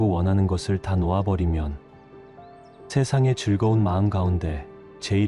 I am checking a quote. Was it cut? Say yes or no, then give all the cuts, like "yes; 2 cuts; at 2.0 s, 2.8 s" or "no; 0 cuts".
no; 0 cuts